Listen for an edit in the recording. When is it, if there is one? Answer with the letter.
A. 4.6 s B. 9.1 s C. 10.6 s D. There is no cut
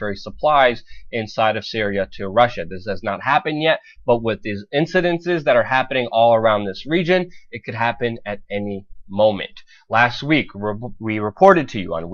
C